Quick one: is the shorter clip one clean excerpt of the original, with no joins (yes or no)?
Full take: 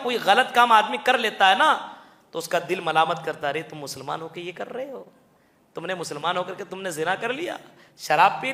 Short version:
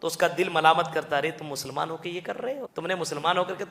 no